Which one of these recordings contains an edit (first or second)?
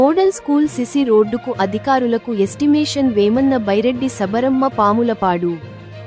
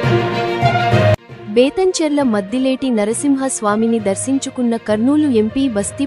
second